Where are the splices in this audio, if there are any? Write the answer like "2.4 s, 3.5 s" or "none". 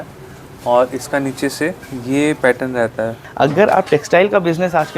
3.2 s